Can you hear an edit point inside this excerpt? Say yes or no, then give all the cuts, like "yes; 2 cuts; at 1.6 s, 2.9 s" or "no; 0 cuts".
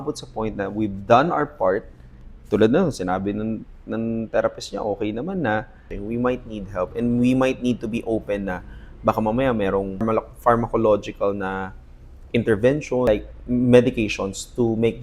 yes; 3 cuts; at 5.9 s, 10.0 s, 13.1 s